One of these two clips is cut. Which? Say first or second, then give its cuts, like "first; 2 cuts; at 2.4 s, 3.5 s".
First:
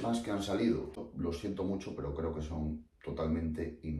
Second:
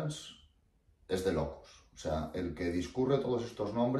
first; 1 cut; at 1.1 s